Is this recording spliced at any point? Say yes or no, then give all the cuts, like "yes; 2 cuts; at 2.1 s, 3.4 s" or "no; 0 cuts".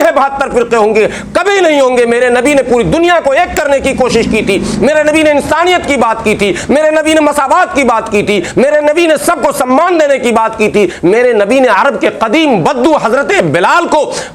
no; 0 cuts